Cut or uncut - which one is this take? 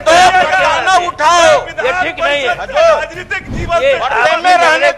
uncut